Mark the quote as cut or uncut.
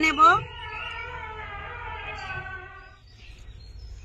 cut